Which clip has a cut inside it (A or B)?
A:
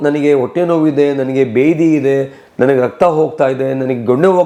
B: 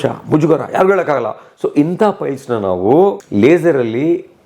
B